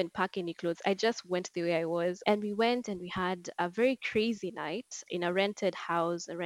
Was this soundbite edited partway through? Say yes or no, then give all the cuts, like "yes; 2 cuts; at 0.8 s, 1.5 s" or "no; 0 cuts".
yes; 1 cut; at 2.2 s